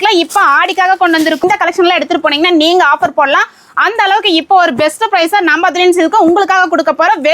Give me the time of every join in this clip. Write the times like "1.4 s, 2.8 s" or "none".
1.4 s